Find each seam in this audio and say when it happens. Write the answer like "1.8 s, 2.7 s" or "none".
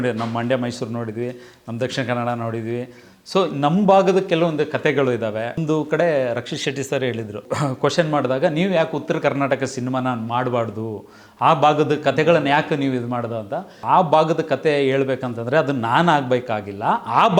5.6 s, 7.4 s, 13.8 s